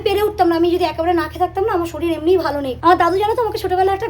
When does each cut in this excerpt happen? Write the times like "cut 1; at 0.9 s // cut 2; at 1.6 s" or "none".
none